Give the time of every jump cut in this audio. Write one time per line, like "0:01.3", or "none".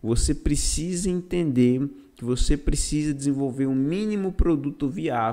none